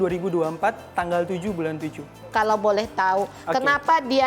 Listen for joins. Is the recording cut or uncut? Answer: cut